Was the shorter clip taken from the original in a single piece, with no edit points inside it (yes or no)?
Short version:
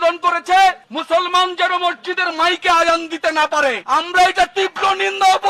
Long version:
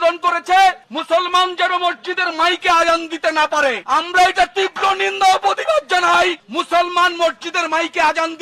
yes